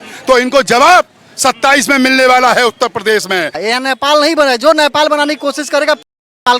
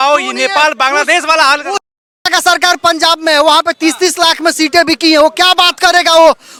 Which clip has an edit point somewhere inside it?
first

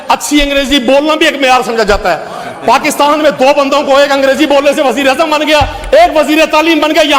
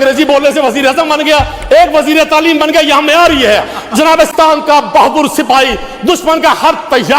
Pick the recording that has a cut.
second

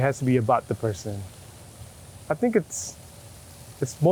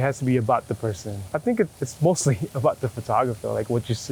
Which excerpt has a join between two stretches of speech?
second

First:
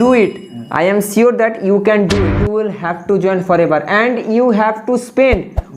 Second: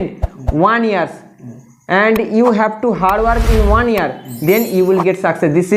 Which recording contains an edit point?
first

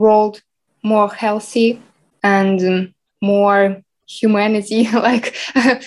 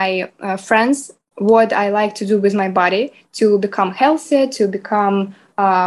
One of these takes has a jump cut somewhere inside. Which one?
second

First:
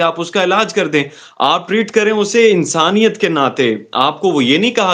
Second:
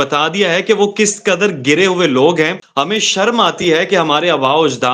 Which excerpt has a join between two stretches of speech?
second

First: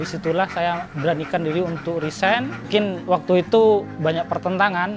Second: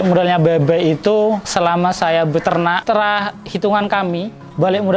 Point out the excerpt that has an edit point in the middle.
second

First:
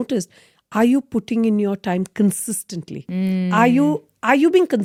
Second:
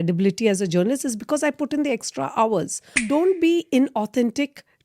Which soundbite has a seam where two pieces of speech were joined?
second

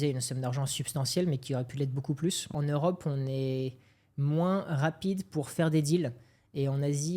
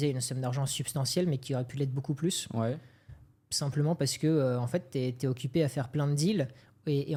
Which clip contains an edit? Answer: first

